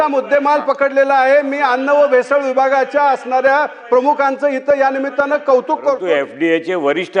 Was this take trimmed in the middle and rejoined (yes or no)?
yes